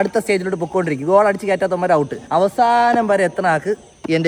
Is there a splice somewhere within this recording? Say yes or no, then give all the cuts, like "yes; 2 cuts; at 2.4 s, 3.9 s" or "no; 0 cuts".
no; 0 cuts